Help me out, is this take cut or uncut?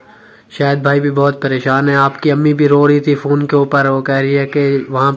uncut